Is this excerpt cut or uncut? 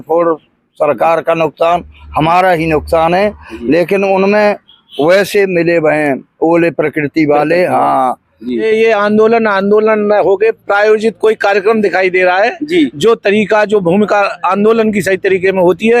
cut